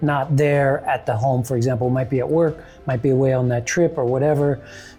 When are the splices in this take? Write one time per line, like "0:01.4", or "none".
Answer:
none